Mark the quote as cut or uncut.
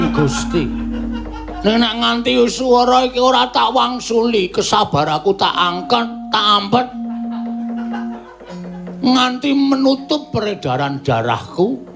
uncut